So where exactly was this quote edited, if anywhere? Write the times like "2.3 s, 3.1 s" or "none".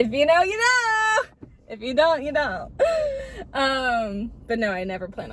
none

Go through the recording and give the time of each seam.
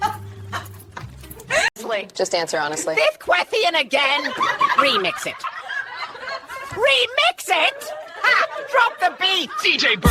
none

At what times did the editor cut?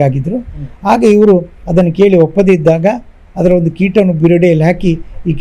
1.6 s

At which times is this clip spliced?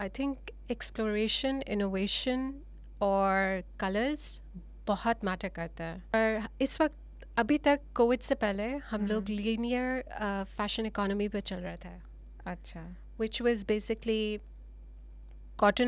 6.1 s

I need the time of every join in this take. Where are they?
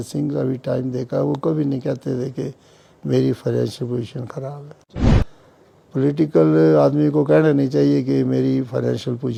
none

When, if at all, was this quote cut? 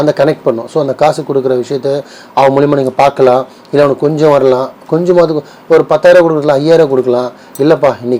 none

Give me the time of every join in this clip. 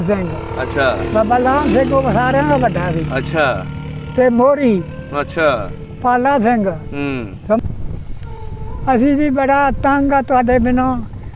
7.6 s

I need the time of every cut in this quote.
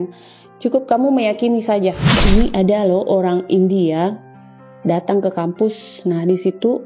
2.1 s

